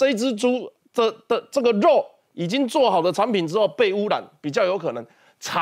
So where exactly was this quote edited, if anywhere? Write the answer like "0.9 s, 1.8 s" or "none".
none